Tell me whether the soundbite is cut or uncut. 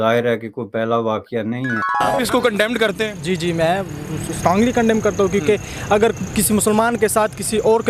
cut